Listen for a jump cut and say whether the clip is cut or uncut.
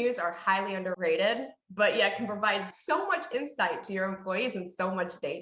cut